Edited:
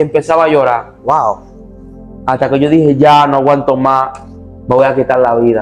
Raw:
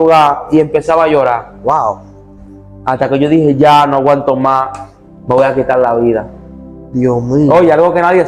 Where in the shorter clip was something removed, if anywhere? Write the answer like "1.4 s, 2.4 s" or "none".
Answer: none